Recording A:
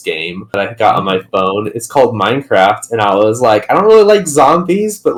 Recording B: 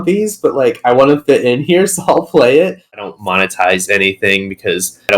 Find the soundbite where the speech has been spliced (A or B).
B